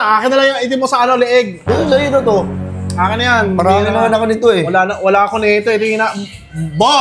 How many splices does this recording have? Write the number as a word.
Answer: zero